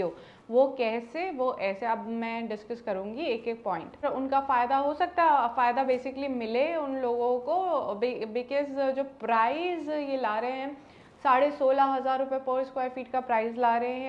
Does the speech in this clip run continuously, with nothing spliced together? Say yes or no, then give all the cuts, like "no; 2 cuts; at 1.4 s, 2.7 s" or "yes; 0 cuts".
no; 1 cut; at 4.1 s